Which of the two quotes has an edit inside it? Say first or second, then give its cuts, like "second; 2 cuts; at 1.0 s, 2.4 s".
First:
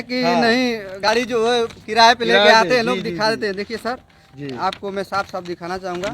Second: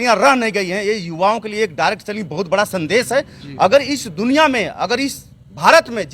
first; 1 cut; at 1.1 s